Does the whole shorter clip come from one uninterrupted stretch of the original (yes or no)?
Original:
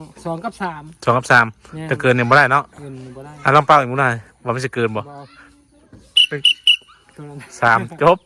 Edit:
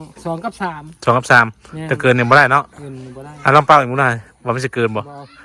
yes